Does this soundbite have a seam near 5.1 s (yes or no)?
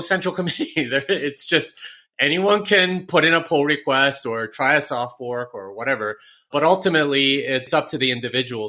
no